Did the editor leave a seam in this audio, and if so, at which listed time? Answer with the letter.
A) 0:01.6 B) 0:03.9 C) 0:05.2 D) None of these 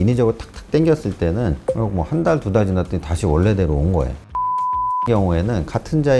A